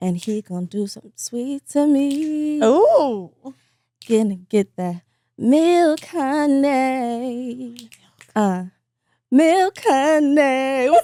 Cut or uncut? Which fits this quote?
uncut